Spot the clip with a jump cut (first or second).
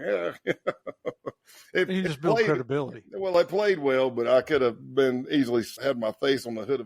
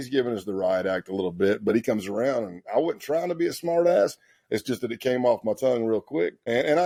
first